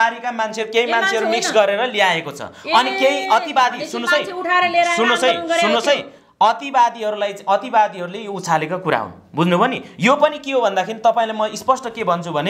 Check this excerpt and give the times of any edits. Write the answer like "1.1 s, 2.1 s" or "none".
none